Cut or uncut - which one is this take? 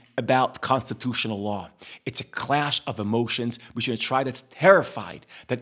uncut